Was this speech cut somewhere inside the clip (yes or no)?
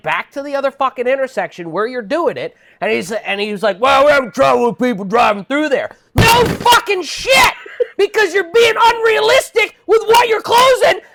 no